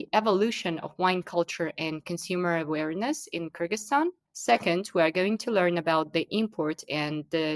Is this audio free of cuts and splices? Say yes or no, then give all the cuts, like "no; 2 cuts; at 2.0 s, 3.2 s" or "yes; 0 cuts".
yes; 0 cuts